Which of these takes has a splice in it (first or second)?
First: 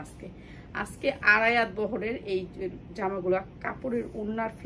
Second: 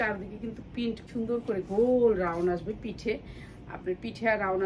second